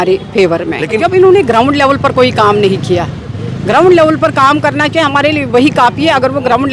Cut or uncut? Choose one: cut